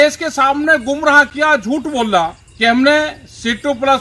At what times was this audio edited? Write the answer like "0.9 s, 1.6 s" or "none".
2.4 s